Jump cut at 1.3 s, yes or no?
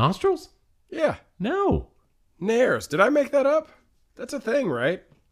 no